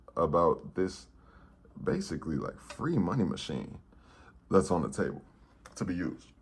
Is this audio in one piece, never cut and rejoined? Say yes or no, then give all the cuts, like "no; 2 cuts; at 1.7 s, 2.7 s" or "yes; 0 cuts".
yes; 0 cuts